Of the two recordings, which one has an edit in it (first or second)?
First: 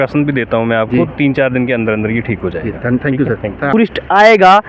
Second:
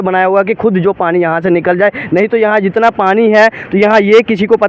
first